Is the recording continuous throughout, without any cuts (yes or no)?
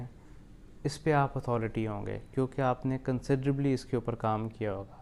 yes